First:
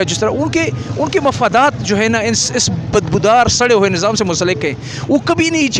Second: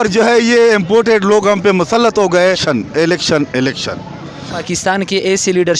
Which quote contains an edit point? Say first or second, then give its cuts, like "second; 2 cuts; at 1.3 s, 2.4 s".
second; 2 cuts; at 2.6 s, 4.4 s